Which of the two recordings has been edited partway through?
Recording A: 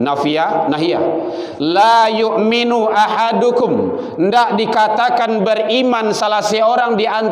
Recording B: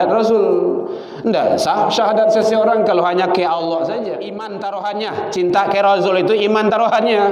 B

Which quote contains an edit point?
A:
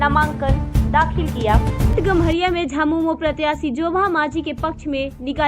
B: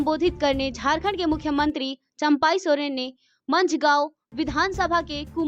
A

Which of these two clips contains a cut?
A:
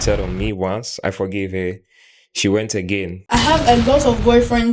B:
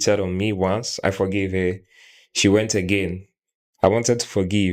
A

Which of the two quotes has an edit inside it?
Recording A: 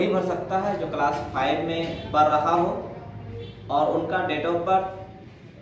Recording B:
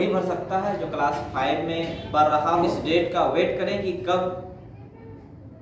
B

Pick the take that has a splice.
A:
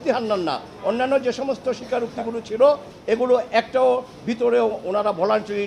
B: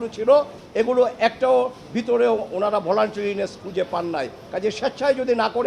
B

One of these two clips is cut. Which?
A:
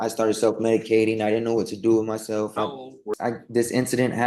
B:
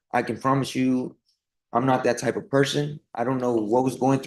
A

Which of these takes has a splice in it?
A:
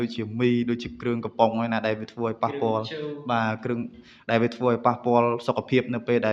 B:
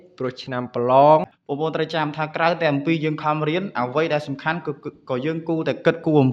B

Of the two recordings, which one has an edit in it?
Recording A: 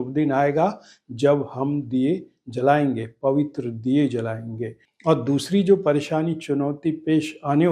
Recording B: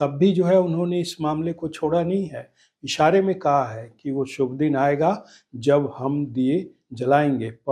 A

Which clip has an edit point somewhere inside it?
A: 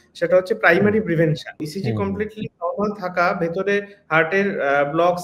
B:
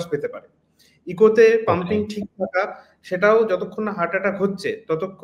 A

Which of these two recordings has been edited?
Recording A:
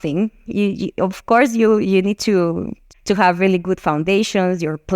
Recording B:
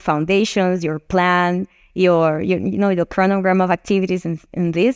A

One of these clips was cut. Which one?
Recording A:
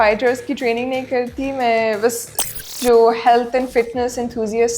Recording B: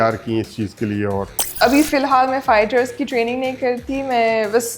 B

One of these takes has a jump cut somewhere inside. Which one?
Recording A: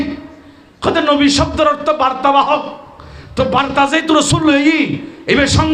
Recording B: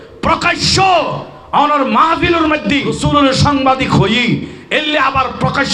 B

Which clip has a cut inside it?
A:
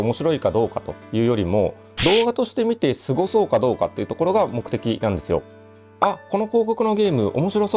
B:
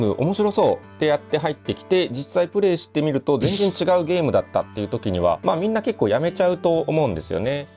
A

